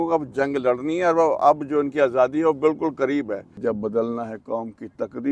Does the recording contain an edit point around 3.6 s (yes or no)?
yes